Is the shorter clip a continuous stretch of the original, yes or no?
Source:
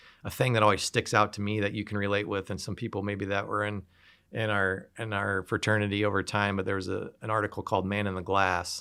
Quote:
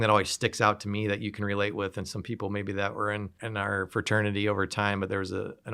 no